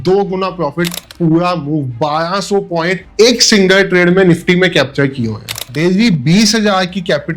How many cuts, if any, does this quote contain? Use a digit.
2